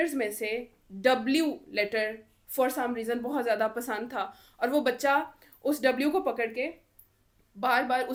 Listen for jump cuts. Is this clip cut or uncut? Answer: uncut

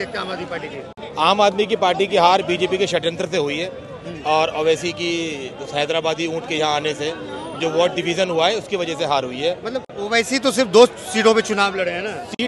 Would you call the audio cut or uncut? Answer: uncut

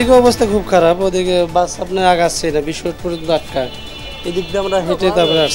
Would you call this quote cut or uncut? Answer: uncut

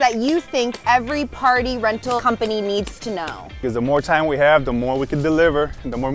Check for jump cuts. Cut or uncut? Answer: cut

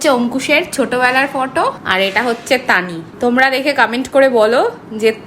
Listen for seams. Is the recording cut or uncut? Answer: cut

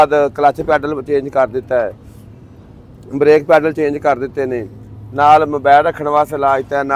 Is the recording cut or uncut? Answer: uncut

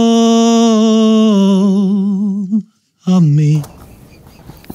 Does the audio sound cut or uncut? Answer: uncut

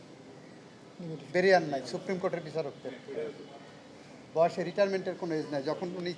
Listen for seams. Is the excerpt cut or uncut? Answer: uncut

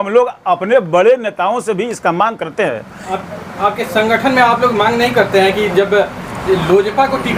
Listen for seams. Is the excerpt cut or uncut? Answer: uncut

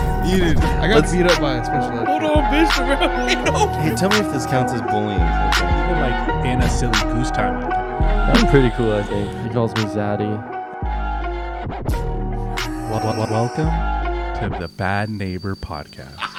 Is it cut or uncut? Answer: uncut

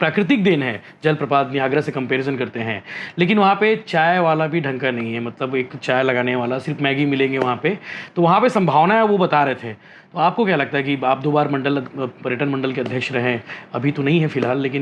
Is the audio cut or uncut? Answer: uncut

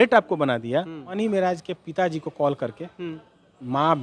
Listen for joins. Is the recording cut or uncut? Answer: cut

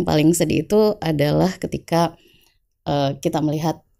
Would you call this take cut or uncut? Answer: uncut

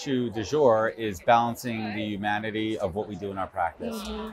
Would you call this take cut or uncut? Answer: uncut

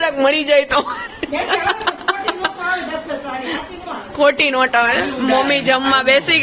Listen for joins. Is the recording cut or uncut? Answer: uncut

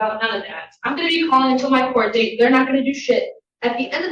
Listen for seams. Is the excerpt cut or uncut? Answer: uncut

